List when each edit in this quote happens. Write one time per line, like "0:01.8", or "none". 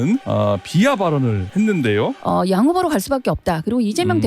0:02.2

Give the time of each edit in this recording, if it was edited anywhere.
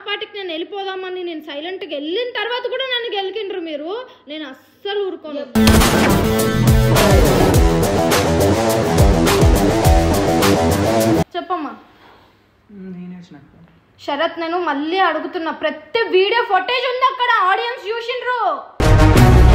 0:11.3

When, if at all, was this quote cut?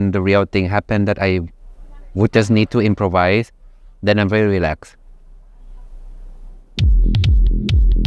none

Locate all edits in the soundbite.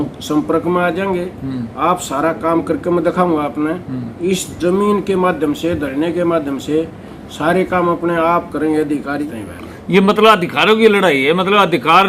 0:09.4

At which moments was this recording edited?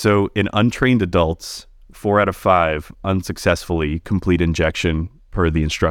none

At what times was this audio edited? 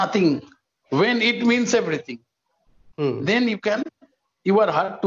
none

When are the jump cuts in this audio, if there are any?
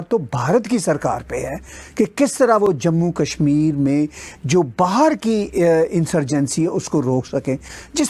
none

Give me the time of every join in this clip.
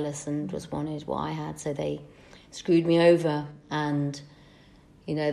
0:03.6

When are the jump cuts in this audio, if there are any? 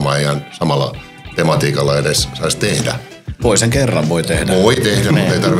none

